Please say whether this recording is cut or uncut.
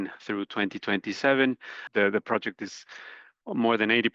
cut